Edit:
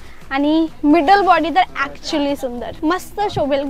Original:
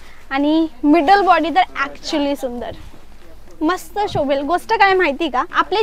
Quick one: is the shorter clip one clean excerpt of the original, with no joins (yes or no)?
no